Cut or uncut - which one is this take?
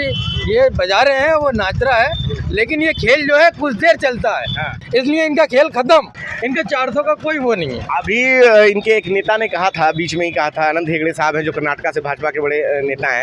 uncut